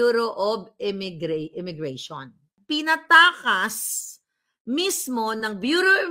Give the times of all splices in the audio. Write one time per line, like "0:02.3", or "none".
0:02.5